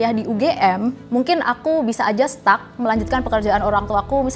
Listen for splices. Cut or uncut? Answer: cut